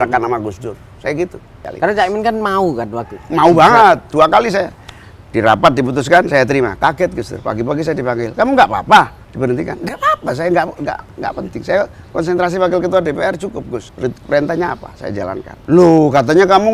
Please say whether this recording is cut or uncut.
cut